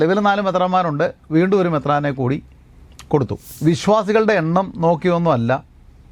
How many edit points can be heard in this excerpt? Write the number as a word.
one